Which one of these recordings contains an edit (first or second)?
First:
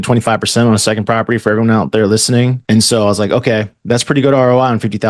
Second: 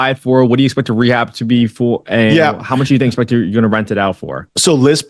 first